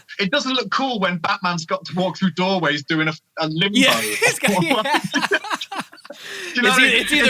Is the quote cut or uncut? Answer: uncut